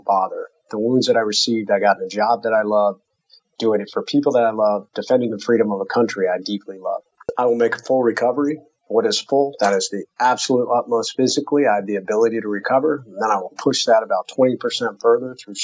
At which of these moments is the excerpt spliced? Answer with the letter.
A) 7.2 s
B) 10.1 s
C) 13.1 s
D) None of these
A